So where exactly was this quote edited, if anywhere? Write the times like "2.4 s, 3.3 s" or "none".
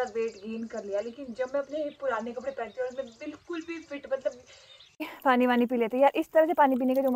5.1 s